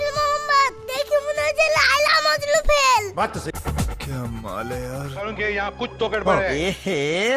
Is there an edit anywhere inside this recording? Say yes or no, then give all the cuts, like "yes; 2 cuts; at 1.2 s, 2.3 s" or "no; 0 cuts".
yes; 1 cut; at 3.5 s